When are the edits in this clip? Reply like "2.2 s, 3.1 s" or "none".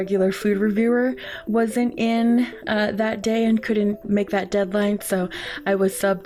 4.0 s